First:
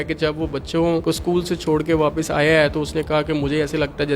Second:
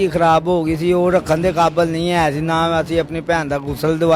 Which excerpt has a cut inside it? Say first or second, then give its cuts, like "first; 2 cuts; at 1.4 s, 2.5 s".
first; 1 cut; at 1.0 s